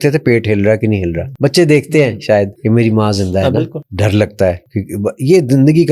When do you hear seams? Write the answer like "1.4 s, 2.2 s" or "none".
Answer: 1.2 s, 2.5 s, 3.8 s, 4.7 s